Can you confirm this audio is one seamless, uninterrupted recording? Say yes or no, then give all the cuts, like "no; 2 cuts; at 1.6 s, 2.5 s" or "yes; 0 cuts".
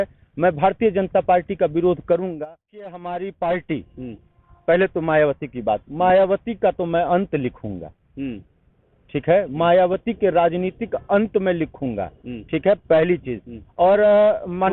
no; 1 cut; at 2.3 s